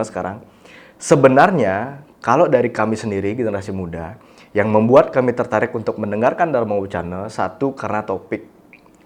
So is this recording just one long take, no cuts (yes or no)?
yes